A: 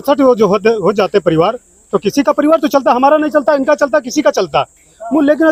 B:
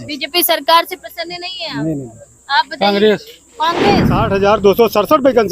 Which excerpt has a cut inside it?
B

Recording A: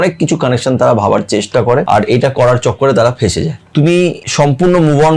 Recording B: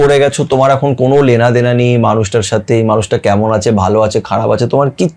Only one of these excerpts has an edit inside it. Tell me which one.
A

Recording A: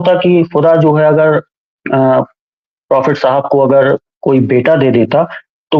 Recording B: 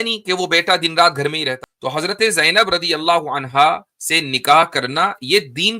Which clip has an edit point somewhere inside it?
B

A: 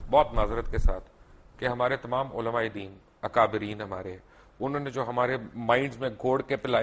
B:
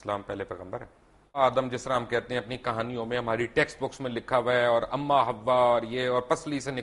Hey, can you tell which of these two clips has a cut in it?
B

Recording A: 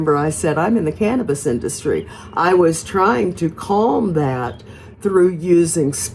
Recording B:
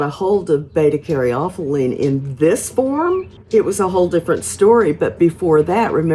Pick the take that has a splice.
B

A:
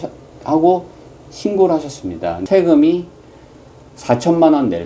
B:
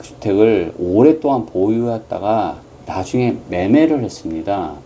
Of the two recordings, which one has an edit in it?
A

